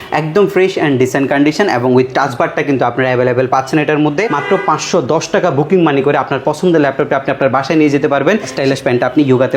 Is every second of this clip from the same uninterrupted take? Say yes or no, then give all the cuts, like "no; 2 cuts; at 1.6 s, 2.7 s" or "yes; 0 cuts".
no; 2 cuts; at 4.3 s, 8.5 s